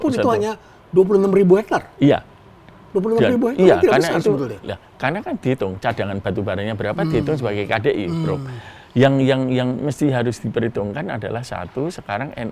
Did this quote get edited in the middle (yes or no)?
no